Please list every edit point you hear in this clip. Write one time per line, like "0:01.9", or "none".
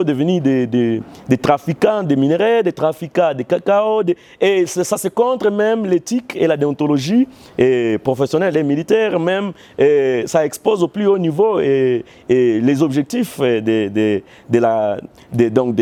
none